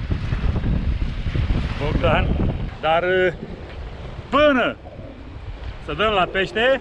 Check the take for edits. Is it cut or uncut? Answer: cut